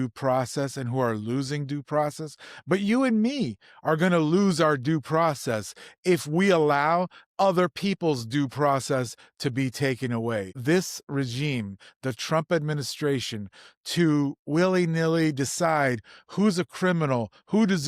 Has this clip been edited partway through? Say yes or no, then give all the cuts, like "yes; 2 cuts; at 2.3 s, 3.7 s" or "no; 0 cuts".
no; 0 cuts